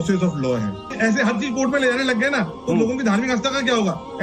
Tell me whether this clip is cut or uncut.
cut